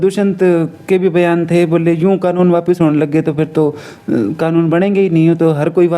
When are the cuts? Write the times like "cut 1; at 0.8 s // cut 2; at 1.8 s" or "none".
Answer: none